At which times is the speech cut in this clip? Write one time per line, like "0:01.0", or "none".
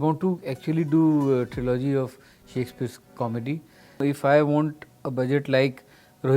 0:04.0